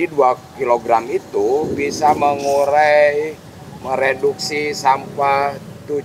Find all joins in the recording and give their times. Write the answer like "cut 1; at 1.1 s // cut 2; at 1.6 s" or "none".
none